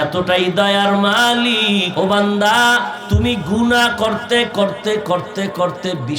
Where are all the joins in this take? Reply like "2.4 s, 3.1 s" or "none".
1.9 s, 3.0 s